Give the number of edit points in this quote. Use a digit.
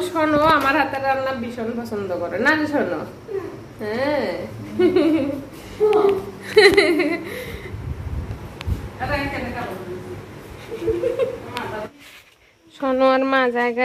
0